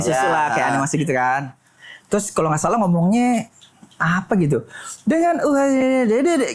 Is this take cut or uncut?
uncut